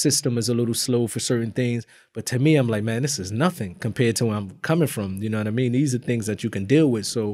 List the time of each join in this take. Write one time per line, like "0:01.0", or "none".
none